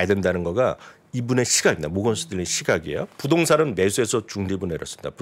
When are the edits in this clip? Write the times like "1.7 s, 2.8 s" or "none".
3.1 s

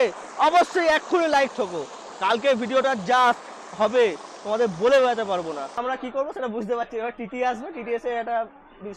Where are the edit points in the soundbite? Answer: 5.8 s

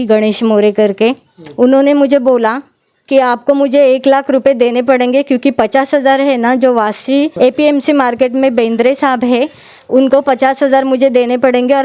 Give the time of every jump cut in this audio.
7.3 s

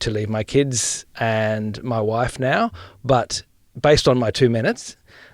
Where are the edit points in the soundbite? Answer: 1.0 s, 3.7 s

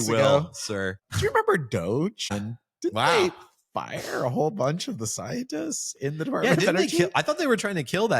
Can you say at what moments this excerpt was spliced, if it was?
1.0 s, 2.4 s

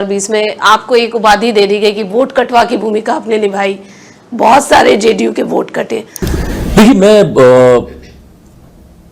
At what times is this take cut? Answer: 6.1 s

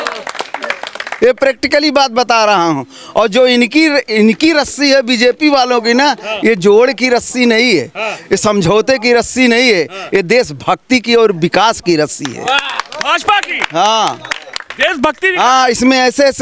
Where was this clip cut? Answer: none

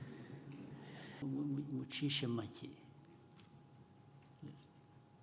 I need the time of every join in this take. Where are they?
1.2 s

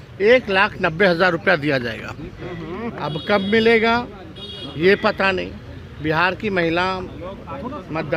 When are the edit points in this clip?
none

